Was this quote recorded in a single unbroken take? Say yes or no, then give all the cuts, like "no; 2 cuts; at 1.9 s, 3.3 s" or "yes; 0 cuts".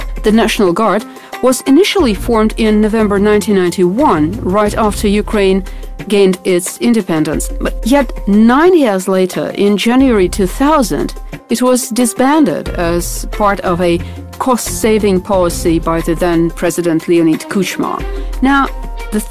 no; 1 cut; at 11.0 s